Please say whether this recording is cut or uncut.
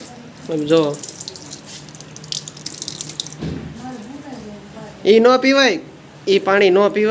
uncut